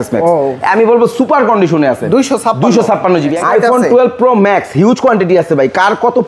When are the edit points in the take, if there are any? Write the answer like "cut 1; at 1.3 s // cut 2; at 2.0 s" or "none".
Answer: cut 1; at 3.3 s